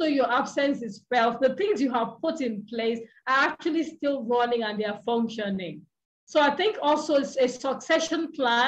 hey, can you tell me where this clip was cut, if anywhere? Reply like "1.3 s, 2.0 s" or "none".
none

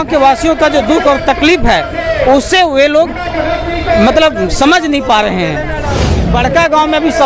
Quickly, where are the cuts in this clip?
6.1 s

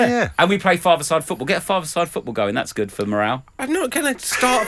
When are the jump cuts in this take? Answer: 3.6 s

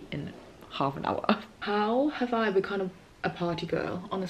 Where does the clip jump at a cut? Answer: 1.5 s

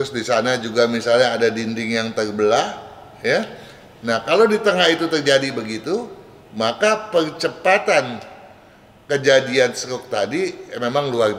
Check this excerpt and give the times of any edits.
none

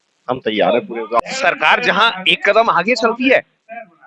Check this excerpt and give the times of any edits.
1.2 s

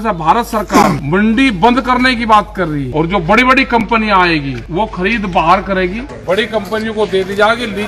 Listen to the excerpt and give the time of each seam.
1.0 s, 2.8 s, 4.6 s, 6.1 s

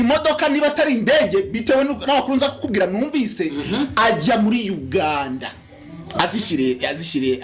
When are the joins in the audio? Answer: none

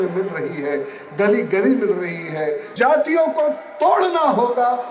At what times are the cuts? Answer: 2.7 s

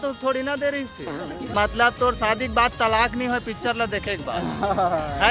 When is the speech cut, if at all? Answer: 1.5 s

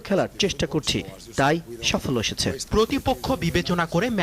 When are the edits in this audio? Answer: 2.6 s

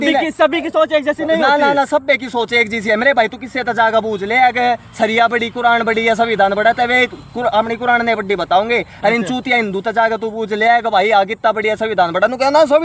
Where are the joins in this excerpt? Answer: none

